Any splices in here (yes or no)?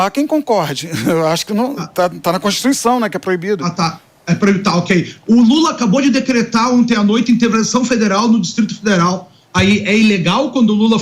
no